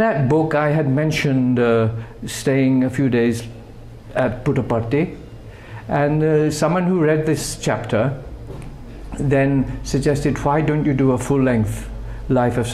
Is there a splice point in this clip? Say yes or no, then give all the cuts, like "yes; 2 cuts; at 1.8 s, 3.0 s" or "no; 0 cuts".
no; 0 cuts